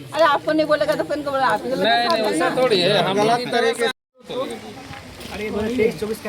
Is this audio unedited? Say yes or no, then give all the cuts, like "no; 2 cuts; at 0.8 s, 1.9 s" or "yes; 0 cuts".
no; 1 cut; at 4.1 s